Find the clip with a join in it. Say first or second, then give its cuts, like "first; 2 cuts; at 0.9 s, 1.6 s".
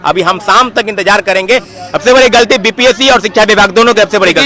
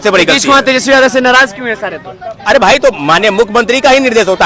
first; 1 cut; at 1.7 s